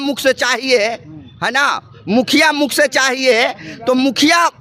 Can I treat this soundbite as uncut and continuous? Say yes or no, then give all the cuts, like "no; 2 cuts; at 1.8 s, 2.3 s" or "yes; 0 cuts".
yes; 0 cuts